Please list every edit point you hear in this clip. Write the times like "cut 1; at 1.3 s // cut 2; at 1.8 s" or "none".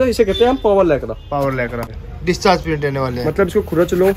cut 1; at 1.9 s